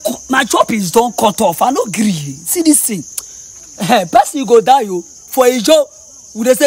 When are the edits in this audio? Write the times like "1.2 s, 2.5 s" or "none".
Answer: none